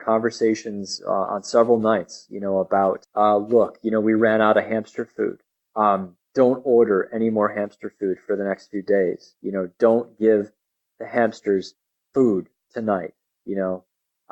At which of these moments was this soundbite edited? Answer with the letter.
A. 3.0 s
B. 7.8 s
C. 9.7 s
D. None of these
A